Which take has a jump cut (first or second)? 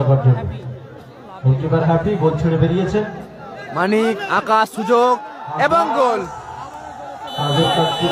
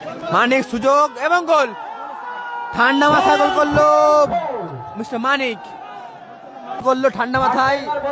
second